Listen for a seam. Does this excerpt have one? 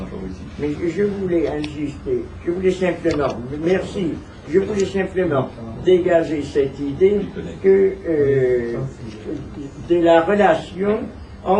no; 0 cuts

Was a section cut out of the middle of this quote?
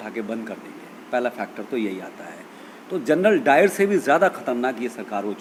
no; 0 cuts

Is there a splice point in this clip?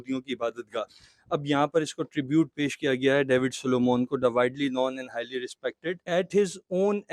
no; 0 cuts

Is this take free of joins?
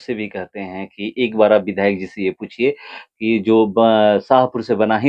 yes; 0 cuts

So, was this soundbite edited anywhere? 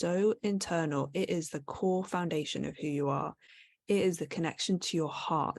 no; 0 cuts

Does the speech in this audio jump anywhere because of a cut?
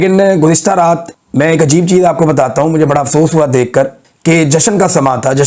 yes; 2 cuts; at 1.1 s, 4.0 s

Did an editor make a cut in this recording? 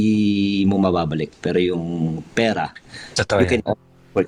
no; 0 cuts

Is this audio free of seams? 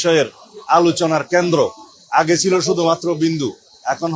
yes; 0 cuts

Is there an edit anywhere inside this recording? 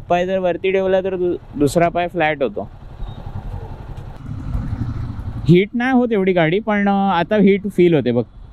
yes; 1 cut; at 4.1 s

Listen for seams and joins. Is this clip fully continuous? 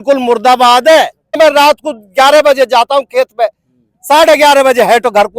no; 1 cut; at 1.4 s

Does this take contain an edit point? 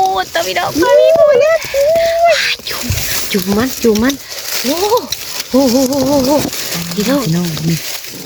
no; 0 cuts

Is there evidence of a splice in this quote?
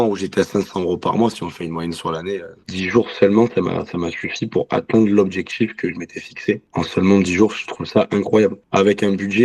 yes; 1 cut; at 2.5 s

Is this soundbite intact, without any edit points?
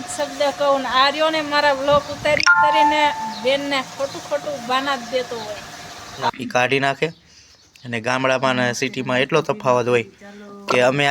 no; 1 cut; at 6.3 s

